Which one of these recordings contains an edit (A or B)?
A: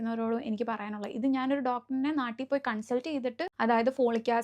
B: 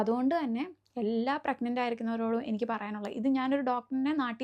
A